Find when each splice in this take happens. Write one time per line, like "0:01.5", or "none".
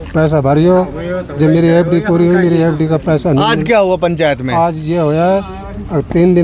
none